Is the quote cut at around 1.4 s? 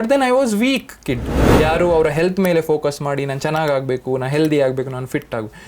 yes; 1 cut; at 1.4 s

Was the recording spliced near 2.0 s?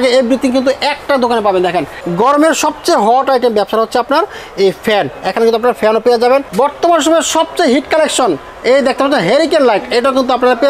yes; 2 cuts; at 2.0 s, 6.5 s

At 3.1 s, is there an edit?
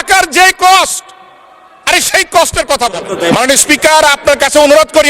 yes; 1 cut; at 3.1 s

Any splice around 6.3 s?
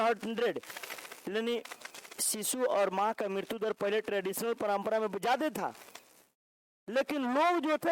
no; 0 cuts

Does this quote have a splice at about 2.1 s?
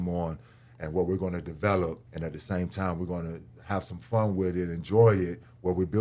yes; 1 cut; at 2.1 s

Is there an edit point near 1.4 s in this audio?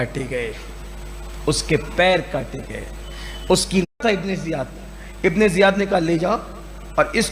no; 1 cut; at 3.9 s

